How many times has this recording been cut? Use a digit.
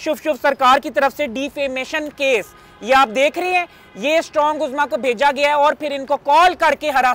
0